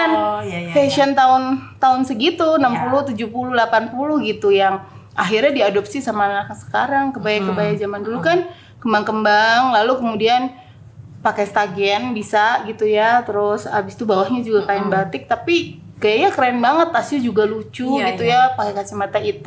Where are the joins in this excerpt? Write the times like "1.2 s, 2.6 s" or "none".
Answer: none